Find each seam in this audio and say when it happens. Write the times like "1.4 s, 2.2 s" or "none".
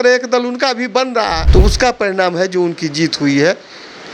1.4 s